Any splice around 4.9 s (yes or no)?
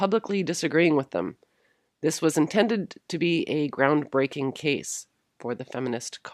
yes